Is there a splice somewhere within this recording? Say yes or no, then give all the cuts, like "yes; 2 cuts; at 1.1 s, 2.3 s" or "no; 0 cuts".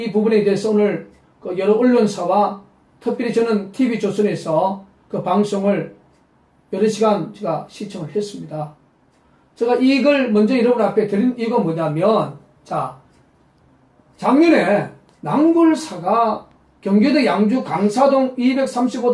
yes; 1 cut; at 13.4 s